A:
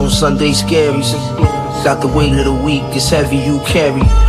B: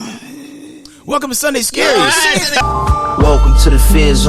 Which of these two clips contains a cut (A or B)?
B